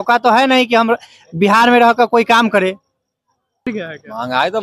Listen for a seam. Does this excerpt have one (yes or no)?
yes